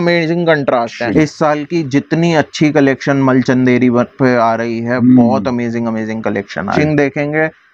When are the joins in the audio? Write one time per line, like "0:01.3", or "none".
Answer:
0:01.1
0:06.7